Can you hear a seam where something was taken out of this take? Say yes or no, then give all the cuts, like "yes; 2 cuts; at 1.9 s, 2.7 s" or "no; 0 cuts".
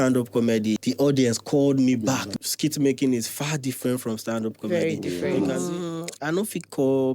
yes; 3 cuts; at 0.8 s, 2.3 s, 5.4 s